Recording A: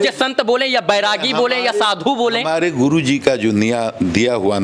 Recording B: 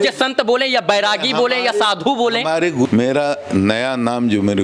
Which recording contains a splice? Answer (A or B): B